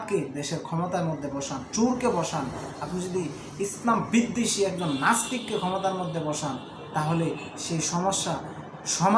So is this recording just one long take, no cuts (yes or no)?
yes